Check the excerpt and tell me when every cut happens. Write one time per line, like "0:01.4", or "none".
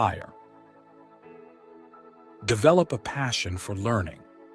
none